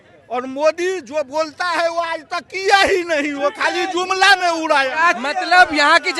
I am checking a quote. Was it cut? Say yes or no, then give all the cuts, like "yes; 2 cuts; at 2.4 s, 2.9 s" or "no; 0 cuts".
yes; 1 cut; at 5.2 s